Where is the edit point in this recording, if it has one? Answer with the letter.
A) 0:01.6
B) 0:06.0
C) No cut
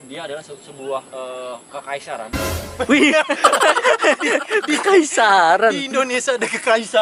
C